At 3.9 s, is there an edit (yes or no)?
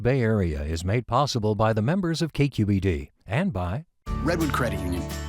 yes